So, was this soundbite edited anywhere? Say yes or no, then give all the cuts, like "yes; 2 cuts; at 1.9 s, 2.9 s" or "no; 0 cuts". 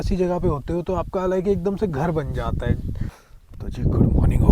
yes; 1 cut; at 3.2 s